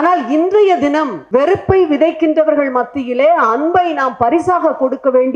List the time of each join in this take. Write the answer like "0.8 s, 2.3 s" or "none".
1.2 s